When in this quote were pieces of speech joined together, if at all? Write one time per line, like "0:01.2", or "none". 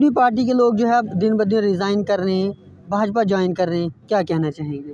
none